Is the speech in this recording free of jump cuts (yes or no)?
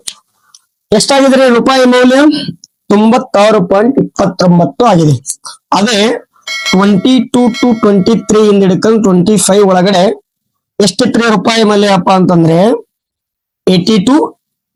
yes